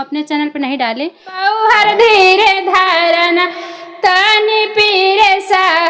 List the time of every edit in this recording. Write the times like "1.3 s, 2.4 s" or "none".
1.5 s